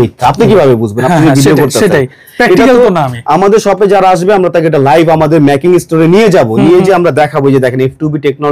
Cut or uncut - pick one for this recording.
uncut